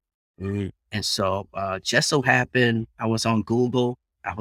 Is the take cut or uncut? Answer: uncut